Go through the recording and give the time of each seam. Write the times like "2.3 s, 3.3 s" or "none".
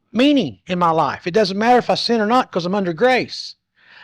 none